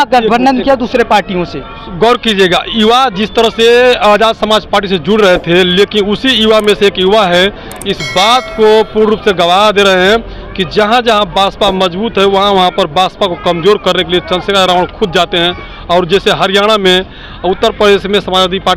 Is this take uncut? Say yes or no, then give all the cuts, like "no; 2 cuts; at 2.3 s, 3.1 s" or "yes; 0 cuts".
yes; 0 cuts